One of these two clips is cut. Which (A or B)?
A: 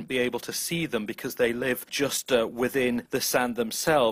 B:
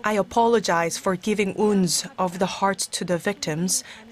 A